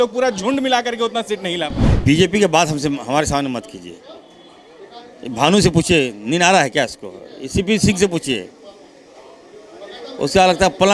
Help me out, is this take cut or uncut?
cut